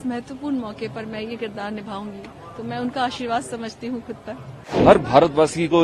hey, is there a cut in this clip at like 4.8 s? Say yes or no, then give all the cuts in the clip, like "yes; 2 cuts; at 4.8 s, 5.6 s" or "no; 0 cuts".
yes; 1 cut; at 4.8 s